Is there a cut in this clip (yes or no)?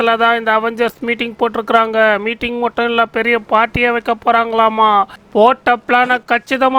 no